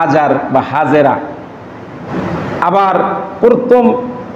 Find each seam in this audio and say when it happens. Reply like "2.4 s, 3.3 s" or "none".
2.0 s